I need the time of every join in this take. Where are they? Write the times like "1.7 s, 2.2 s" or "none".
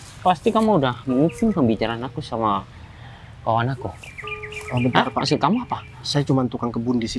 none